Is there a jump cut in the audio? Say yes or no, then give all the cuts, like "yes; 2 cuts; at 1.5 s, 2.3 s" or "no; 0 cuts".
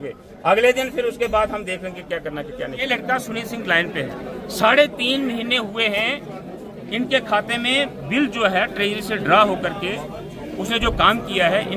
yes; 1 cut; at 2.9 s